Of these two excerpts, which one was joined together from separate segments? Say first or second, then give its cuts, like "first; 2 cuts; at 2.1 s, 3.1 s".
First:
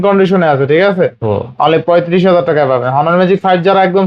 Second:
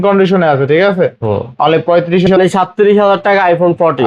second; 1 cut; at 2.3 s